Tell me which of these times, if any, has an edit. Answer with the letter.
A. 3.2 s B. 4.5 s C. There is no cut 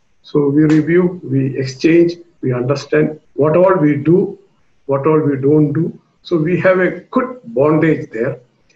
A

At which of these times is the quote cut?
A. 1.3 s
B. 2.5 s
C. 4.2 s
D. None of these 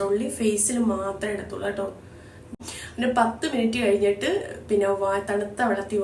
B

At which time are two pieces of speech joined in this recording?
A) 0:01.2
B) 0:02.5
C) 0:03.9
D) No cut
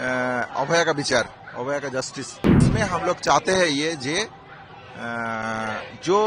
B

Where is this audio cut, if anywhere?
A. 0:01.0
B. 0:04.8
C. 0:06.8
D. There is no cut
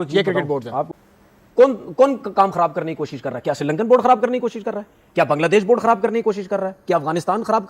A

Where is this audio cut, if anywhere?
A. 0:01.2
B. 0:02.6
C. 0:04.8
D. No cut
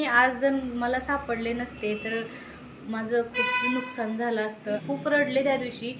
C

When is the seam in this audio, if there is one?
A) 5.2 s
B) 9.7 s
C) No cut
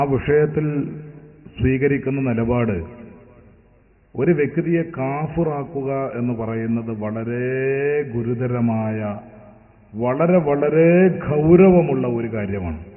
C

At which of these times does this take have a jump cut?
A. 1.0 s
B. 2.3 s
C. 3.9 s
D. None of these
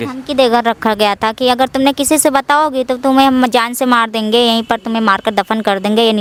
D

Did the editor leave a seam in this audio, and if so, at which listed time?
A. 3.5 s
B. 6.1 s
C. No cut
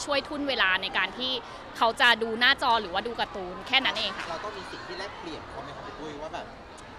C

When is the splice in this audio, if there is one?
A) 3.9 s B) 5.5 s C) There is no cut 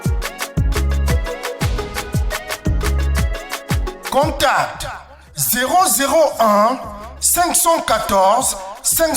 A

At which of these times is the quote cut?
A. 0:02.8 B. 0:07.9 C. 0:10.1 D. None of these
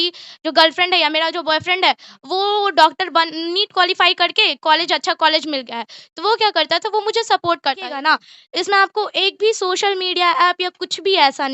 B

